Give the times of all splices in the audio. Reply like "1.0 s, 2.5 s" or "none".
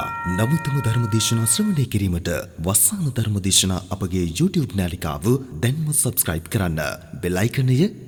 none